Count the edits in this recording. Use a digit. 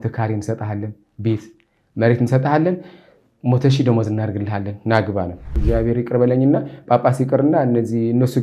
1